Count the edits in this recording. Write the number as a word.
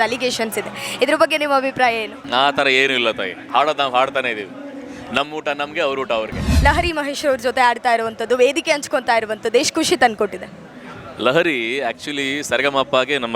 two